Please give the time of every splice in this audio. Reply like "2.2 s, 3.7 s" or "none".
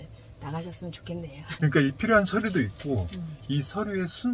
1.5 s